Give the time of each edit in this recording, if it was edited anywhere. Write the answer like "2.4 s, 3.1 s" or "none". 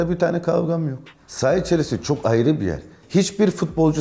1.0 s